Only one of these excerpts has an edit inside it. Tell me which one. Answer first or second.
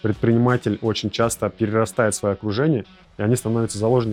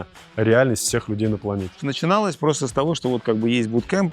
second